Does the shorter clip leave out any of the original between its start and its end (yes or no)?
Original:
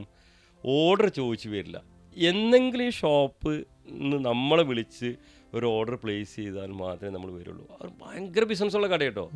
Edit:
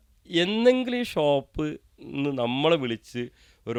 no